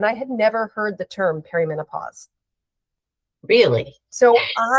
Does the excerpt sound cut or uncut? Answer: uncut